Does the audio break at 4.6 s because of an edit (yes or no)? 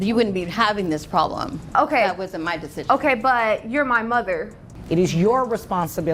yes